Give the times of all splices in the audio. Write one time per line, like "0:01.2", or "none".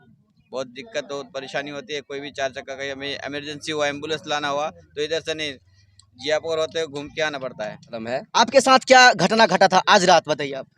0:08.0